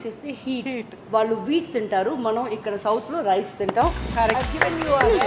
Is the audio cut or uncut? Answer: cut